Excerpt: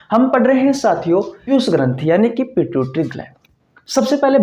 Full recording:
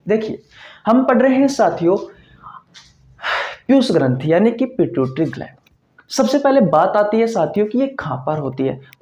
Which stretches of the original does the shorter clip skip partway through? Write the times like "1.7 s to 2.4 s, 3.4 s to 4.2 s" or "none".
2.1 s to 3.6 s